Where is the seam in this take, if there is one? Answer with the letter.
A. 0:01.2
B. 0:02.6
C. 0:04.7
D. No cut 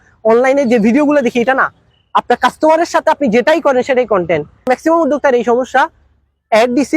C